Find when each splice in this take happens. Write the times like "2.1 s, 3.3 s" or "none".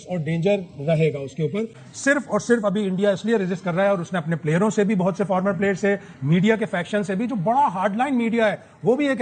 none

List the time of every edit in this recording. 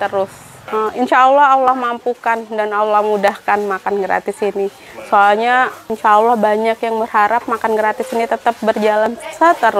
none

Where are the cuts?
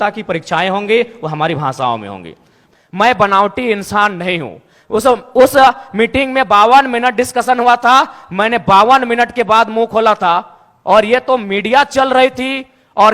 2.5 s

